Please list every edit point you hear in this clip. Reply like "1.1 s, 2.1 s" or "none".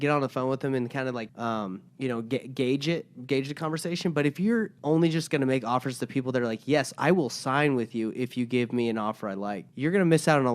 1.6 s, 4.7 s, 9.6 s